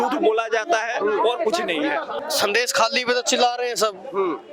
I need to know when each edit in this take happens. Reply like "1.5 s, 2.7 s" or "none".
2.1 s

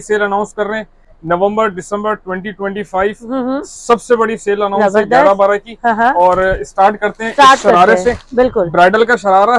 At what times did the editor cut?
none

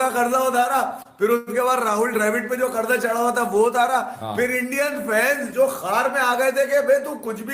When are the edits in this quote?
none

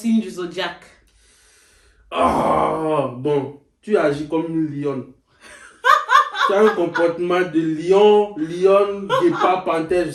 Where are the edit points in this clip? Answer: none

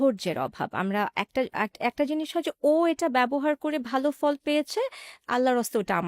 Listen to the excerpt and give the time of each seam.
none

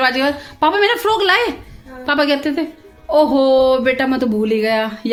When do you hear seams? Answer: none

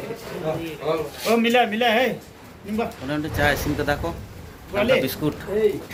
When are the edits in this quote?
none

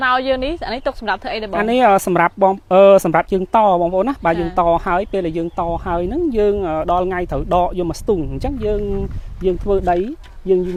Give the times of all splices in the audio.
none

